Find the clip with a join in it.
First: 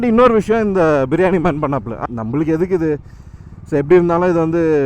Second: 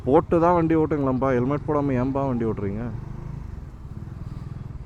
first; 1 cut; at 1.9 s

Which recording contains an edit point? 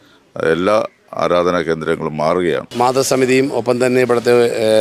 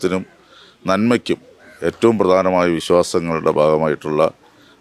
first; 1 cut; at 2.7 s

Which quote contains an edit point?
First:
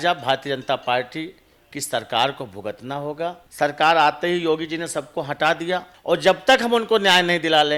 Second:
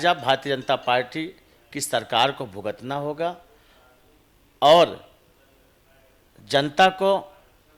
first; 2 cuts; at 3.4 s, 5.9 s

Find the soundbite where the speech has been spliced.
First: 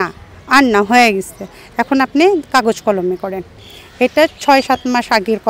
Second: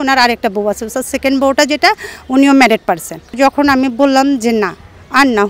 second; 1 cut; at 3.4 s

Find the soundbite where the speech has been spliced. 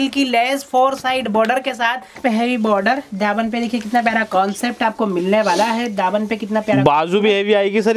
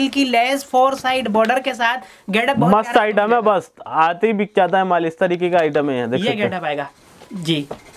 first; 1 cut; at 2.1 s

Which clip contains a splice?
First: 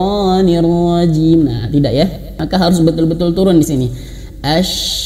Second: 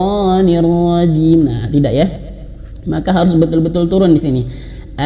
first; 1 cut; at 2.3 s

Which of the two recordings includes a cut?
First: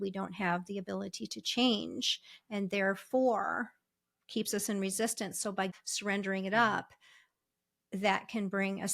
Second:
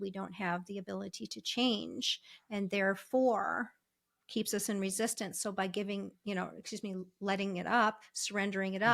first; 1 cut; at 5.7 s

